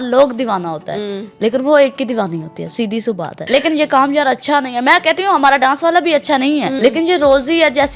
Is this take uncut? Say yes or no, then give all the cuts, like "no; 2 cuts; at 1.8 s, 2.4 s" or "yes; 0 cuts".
no; 2 cuts; at 3.4 s, 6.8 s